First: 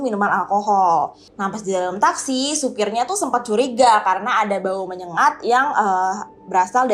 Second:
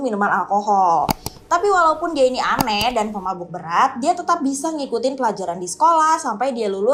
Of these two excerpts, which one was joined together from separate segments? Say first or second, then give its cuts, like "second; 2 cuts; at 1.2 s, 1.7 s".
first; 1 cut; at 1.1 s